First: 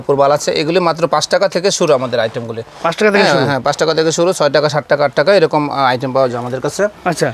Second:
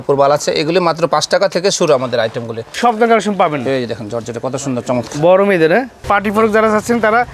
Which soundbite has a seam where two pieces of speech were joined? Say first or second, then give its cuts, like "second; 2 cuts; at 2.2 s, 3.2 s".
second; 2 cuts; at 2.7 s, 6.0 s